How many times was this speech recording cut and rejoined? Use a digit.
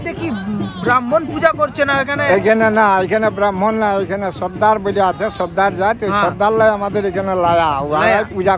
0